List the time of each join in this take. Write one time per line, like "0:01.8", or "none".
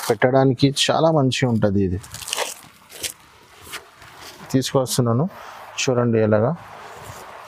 0:04.4